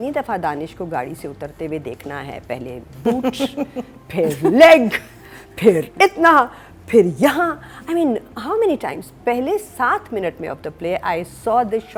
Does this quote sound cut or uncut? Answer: uncut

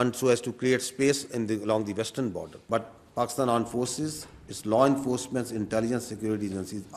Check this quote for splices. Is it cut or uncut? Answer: cut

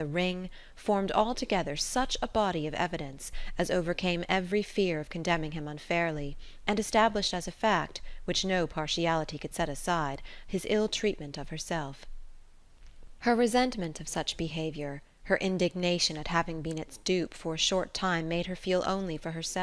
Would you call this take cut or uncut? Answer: uncut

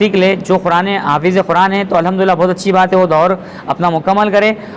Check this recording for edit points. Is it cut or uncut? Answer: uncut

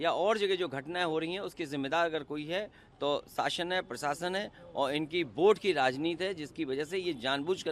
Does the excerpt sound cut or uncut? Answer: uncut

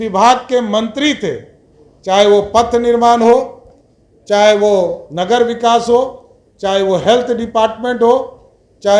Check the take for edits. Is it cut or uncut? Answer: uncut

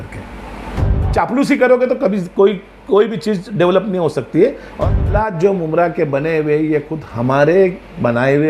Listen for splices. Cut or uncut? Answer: cut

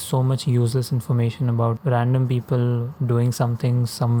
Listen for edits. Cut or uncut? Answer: uncut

